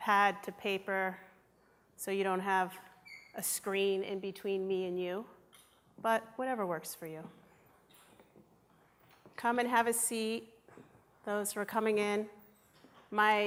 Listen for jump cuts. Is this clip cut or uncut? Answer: uncut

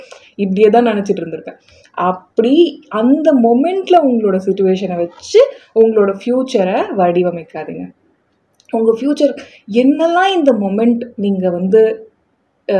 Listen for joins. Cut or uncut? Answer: uncut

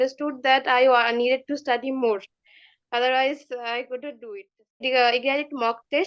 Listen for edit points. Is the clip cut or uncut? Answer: cut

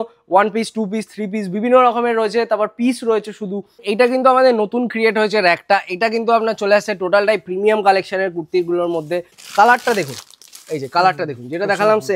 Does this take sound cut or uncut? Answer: cut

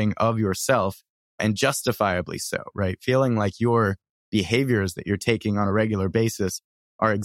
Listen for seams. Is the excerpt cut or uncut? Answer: cut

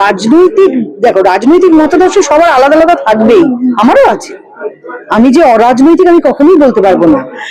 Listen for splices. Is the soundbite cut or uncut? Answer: uncut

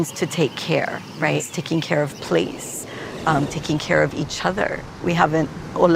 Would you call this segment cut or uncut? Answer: cut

